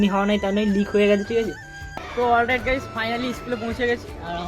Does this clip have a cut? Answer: yes; 1 cut; at 2.0 s

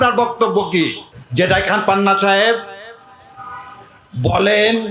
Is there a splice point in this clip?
yes; 1 cut; at 1.1 s

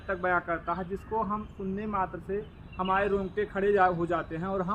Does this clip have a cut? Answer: no; 0 cuts

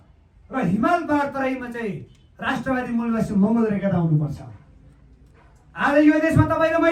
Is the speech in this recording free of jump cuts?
yes; 0 cuts

